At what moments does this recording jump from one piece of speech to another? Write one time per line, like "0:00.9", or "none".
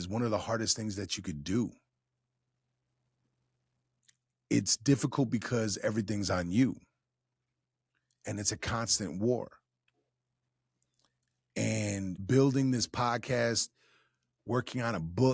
0:12.2